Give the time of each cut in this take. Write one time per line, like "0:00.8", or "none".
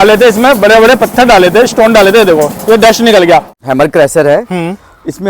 0:03.5